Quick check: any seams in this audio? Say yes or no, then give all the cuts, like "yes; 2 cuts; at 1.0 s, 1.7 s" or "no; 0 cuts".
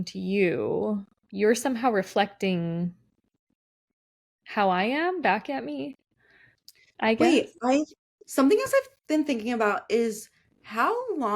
yes; 1 cut; at 1.2 s